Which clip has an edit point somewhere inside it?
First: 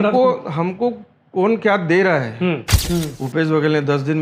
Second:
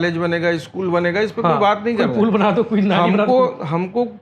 first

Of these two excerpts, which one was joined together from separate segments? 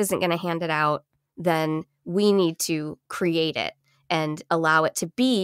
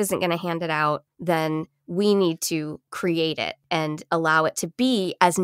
second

